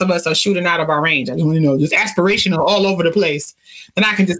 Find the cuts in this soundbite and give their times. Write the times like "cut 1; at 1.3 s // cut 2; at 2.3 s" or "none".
none